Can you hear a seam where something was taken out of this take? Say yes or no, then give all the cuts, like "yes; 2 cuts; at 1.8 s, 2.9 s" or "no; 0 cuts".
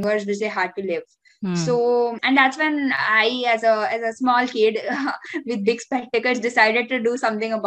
yes; 1 cut; at 2.2 s